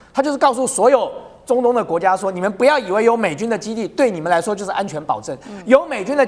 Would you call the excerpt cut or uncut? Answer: uncut